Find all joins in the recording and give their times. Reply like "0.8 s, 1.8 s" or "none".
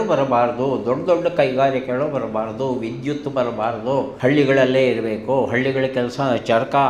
4.1 s